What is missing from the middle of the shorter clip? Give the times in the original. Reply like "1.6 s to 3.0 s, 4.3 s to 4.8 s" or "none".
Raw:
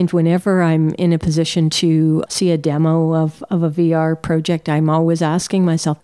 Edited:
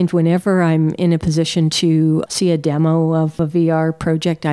3.4 s to 3.6 s